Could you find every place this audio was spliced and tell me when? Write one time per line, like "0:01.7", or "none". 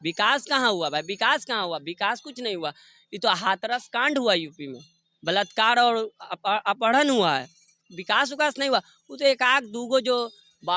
none

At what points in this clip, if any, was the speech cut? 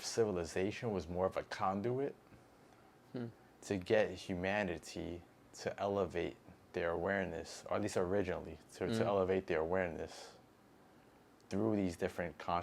none

